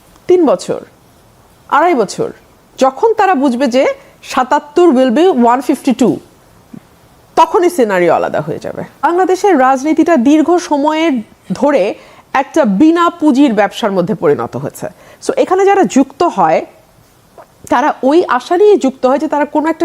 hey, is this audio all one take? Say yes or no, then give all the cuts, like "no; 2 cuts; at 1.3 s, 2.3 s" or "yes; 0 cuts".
no; 1 cut; at 9.1 s